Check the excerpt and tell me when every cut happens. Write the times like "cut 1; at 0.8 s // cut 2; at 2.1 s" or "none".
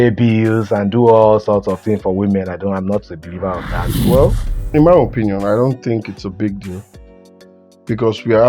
cut 1; at 3.9 s